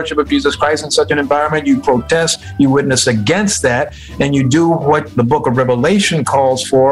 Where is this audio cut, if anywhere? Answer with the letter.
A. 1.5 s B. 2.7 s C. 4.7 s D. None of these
D